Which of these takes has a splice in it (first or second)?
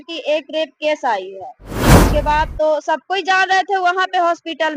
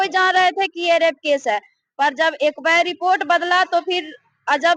first